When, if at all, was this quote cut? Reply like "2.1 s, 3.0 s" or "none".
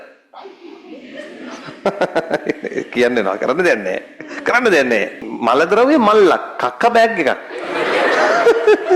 5.3 s